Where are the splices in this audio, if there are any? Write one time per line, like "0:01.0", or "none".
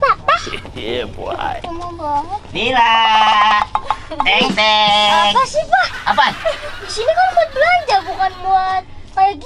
none